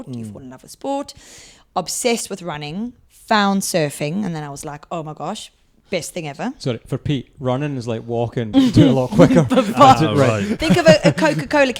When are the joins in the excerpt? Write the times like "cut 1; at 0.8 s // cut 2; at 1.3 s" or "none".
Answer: none